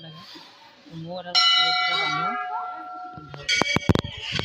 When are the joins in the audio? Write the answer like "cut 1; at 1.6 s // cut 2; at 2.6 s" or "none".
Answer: cut 1; at 3.5 s